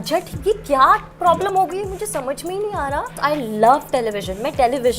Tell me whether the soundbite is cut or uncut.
cut